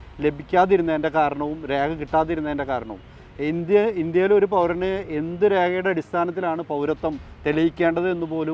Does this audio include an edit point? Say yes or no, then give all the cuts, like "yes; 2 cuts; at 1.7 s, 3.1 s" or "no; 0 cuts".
no; 0 cuts